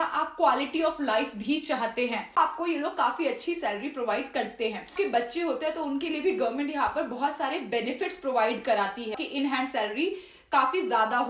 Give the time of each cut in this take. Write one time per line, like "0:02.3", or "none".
0:02.4
0:04.9
0:09.1